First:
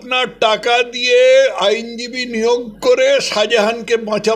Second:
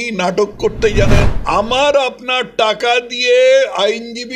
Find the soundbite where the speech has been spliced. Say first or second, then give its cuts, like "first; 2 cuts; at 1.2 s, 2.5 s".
second; 1 cut; at 1.3 s